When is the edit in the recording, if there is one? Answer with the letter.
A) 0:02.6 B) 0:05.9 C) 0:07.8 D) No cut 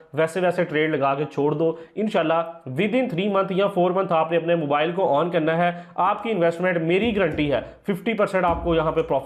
D